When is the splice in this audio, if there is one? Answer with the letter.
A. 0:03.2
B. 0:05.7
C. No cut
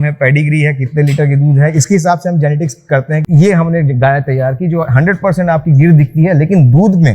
A